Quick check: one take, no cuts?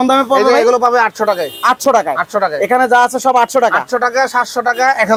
yes; 0 cuts

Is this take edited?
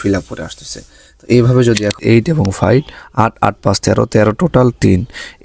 yes; 1 cut; at 2.0 s

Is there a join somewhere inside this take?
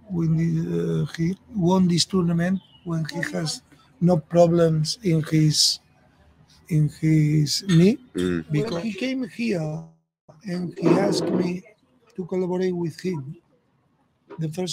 yes; 1 cut; at 8.6 s

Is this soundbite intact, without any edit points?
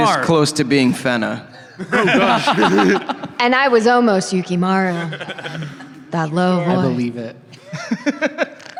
yes; 0 cuts

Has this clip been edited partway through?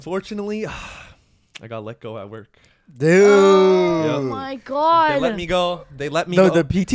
no; 0 cuts

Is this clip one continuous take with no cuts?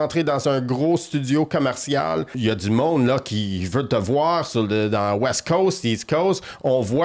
no; 1 cut; at 2.3 s

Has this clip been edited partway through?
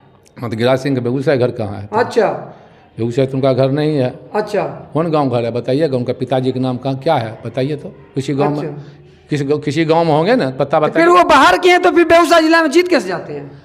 no; 0 cuts

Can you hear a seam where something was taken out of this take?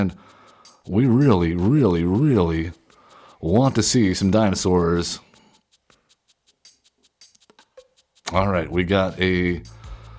no; 0 cuts

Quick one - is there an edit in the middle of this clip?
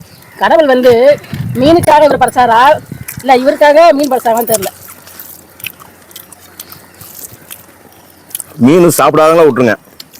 no; 0 cuts

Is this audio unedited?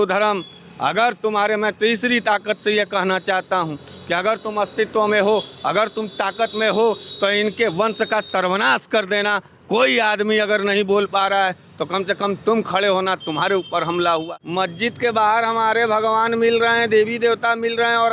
no; 1 cut; at 14.2 s

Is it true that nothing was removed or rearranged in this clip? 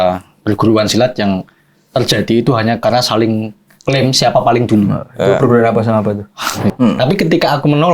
no; 1 cut; at 6.7 s

